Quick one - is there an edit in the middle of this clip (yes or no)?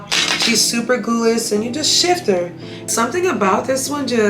yes